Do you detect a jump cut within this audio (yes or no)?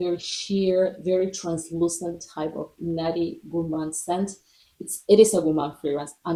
no